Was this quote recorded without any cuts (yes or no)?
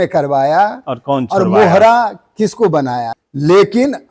no